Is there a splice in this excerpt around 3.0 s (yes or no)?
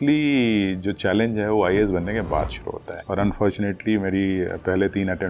yes